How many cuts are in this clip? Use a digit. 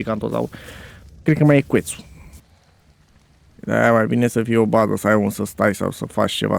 1